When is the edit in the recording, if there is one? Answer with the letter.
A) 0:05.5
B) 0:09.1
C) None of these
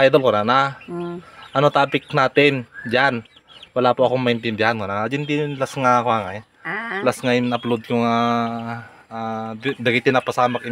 C